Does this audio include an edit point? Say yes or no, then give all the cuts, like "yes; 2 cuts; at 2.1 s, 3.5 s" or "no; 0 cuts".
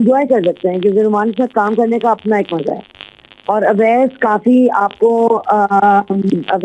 no; 0 cuts